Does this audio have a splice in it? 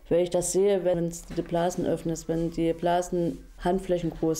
yes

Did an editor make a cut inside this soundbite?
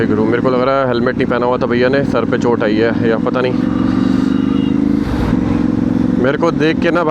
no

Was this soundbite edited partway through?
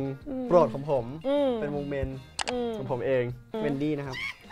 yes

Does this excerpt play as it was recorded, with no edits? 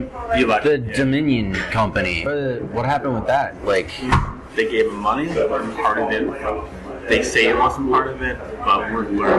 no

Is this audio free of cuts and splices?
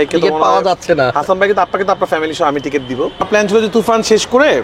no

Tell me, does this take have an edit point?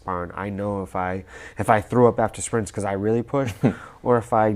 no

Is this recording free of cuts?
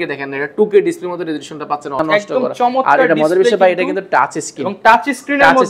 no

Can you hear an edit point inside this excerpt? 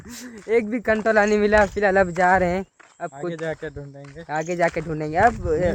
no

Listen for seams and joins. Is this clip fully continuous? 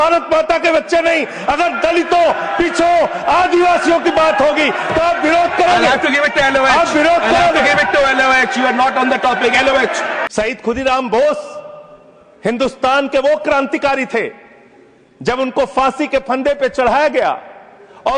yes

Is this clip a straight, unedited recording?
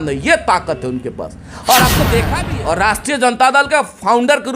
no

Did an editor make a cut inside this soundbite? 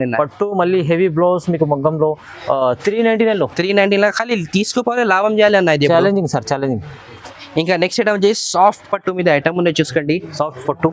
no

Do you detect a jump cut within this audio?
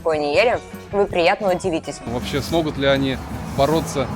yes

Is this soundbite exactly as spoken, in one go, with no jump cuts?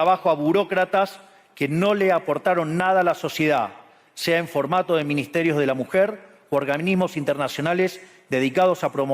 yes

